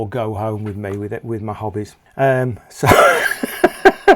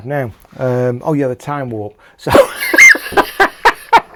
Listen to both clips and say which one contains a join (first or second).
first